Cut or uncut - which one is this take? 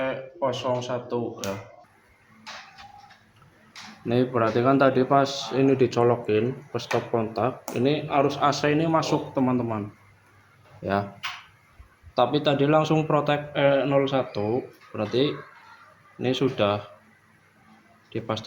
cut